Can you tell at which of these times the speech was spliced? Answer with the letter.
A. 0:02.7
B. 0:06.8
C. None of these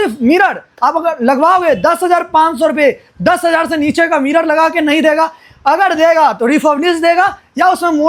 C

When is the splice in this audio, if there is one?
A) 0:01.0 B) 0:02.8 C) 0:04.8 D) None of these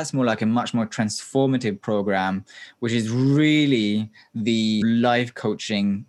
C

